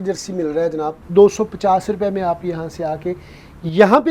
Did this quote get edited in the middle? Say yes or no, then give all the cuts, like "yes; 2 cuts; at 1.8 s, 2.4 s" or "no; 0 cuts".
yes; 1 cut; at 1.0 s